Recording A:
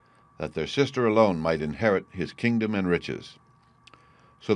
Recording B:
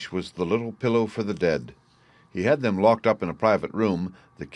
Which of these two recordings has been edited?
A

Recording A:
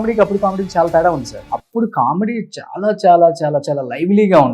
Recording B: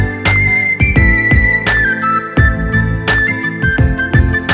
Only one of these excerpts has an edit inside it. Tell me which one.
A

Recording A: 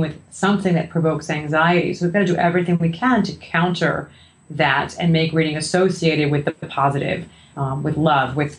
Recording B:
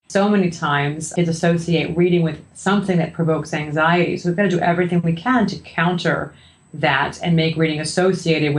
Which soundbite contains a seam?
B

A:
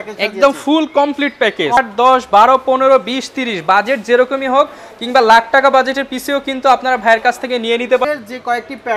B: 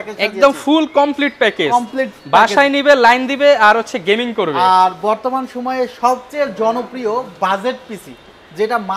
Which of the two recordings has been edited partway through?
A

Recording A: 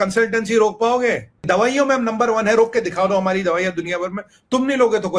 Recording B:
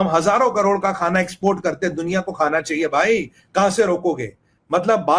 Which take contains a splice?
A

